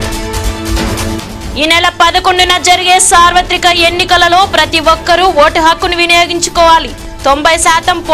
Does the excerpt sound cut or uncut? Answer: cut